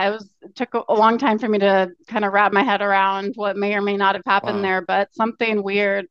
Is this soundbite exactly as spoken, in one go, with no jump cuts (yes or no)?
yes